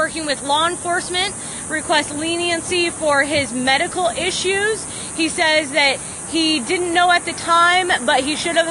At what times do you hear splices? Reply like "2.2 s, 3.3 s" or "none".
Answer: none